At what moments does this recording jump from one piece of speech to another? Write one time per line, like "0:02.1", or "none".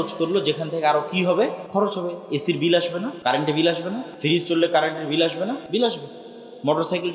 0:01.6
0:03.1
0:04.1
0:05.6